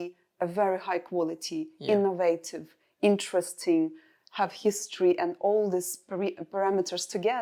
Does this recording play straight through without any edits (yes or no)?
yes